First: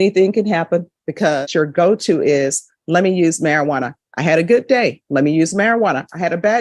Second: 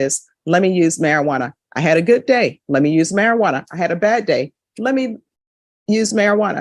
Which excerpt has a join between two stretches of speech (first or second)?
first